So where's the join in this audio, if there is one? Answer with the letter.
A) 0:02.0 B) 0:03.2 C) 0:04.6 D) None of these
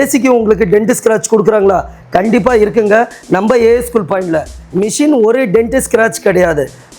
C